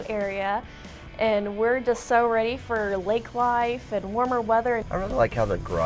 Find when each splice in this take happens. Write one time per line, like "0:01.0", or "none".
0:04.8